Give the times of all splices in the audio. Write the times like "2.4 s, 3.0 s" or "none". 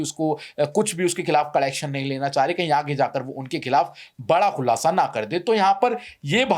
none

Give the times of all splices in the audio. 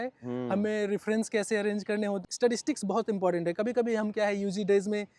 2.2 s

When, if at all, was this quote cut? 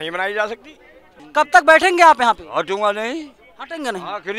1.2 s

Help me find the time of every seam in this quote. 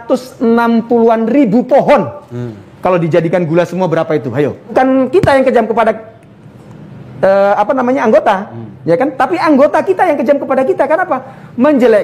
4.7 s

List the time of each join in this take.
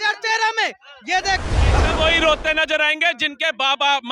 1.6 s

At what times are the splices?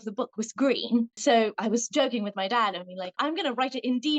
1.2 s, 3.2 s

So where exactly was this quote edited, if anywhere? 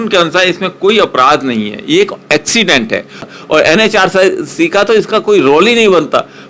3.2 s

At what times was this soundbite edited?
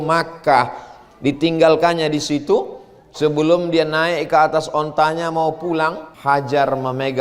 6.1 s

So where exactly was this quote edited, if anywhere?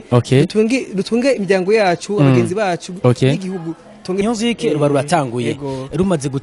4.2 s

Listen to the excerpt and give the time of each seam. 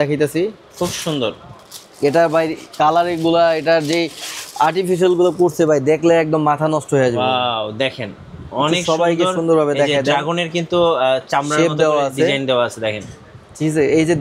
none

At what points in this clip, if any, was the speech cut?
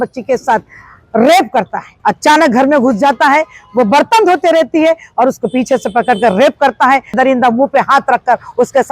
1.8 s, 7.2 s

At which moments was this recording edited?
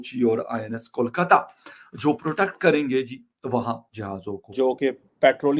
4.5 s

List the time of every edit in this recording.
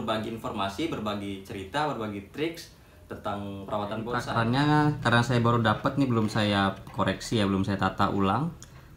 4.3 s

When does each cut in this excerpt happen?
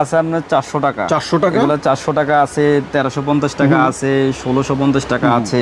none

